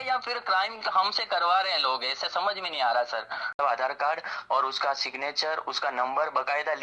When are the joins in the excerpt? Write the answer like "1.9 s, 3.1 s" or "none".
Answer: 3.5 s

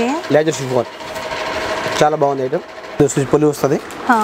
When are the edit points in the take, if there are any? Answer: 2.9 s

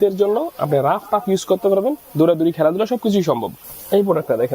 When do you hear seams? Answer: none

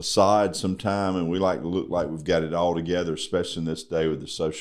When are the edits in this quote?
none

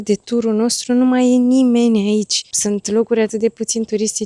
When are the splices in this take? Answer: 2.4 s

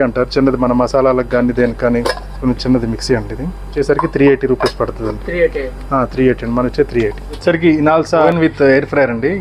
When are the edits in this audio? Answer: 2.4 s, 3.7 s, 7.3 s, 8.3 s

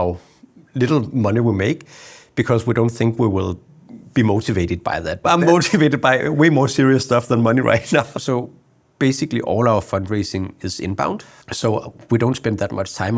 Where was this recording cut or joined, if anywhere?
5.2 s, 8.1 s, 11.4 s

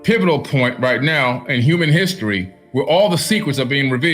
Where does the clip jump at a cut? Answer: 2.5 s

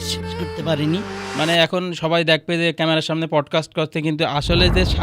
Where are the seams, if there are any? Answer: 1.2 s

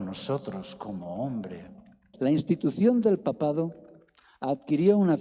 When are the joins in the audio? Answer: 2.0 s

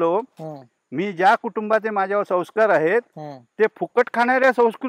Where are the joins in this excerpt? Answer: none

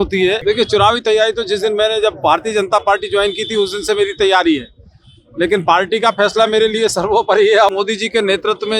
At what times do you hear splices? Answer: 7.7 s

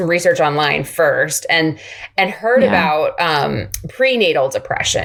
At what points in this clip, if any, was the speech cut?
none

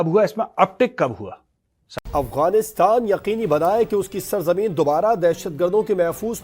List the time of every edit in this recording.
2.0 s

